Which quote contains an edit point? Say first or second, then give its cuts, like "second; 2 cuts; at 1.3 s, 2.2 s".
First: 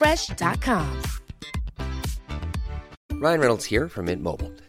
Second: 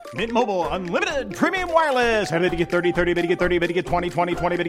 first; 1 cut; at 2.9 s